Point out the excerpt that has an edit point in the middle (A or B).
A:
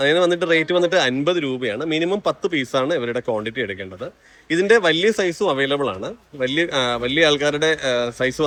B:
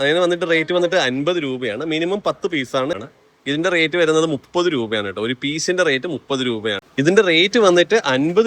B